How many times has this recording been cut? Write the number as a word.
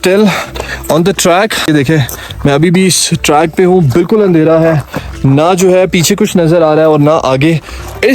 one